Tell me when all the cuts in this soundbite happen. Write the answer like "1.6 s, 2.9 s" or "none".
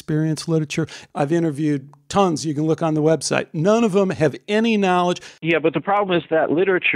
1.0 s, 5.4 s